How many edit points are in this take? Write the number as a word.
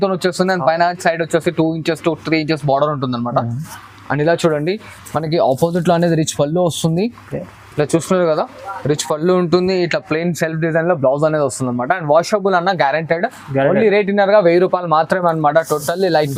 zero